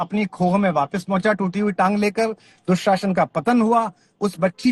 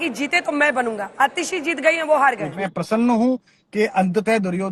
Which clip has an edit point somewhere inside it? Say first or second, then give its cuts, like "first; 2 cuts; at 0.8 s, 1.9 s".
second; 1 cut; at 2.7 s